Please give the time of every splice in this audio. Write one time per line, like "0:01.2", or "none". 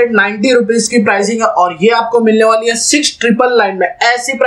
none